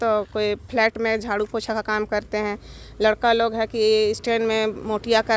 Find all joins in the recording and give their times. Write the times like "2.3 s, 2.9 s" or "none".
none